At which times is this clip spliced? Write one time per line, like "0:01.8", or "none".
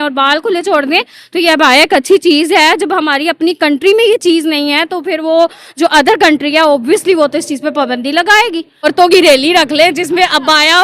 0:08.9